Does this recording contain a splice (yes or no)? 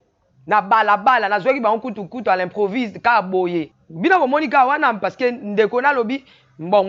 yes